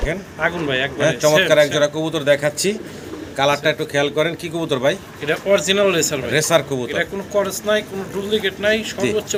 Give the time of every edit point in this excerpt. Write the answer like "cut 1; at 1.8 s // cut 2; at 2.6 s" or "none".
none